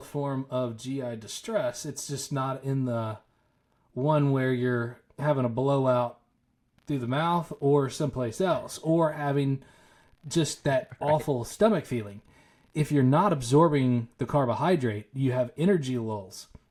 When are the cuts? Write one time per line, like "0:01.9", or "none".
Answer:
none